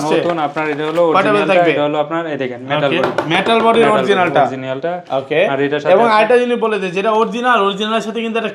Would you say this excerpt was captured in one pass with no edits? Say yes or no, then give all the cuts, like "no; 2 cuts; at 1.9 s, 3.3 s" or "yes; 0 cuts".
yes; 0 cuts